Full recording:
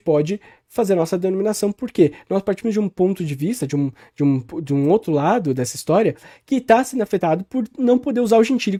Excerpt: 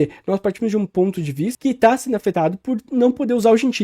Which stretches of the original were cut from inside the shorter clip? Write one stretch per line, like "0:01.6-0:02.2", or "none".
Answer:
0:03.6-0:06.4